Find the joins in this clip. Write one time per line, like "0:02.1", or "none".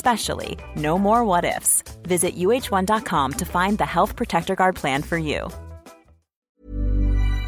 0:06.5